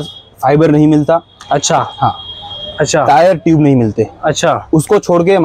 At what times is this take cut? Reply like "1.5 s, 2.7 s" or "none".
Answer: none